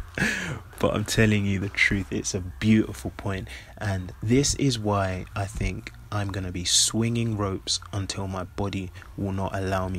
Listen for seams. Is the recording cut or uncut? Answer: uncut